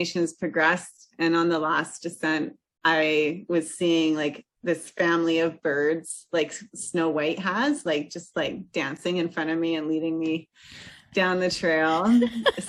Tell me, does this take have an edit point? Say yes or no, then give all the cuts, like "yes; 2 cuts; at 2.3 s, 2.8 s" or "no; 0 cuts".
no; 0 cuts